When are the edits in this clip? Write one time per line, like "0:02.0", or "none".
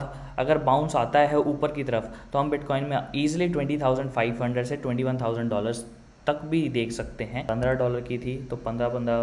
0:07.4